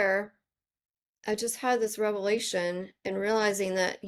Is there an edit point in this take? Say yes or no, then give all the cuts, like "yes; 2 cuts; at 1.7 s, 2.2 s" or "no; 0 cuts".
no; 0 cuts